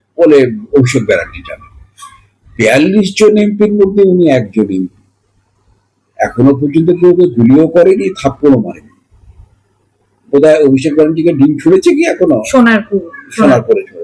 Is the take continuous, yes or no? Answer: yes